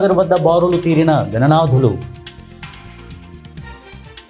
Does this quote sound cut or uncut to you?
uncut